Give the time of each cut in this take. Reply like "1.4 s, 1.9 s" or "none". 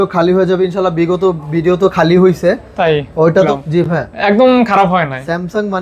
3.5 s